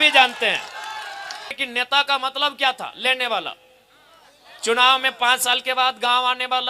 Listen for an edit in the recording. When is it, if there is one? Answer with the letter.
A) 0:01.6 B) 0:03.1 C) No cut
A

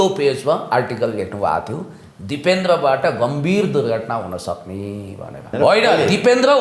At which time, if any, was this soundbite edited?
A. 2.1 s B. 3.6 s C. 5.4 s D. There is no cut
C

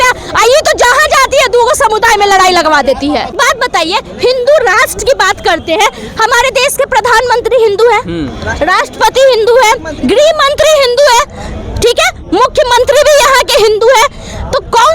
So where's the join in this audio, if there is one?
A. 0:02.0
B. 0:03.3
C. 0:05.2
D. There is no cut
B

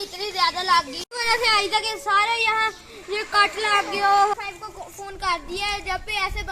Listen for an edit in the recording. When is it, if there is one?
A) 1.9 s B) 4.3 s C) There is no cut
B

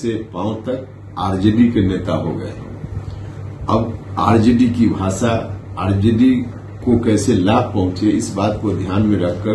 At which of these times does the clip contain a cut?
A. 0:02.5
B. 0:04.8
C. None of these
C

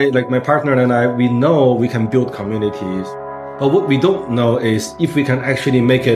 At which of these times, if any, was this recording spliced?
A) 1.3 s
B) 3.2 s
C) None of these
B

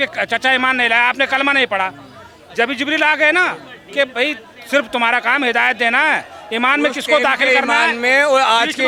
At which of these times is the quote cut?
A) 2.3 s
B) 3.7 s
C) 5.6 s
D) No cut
D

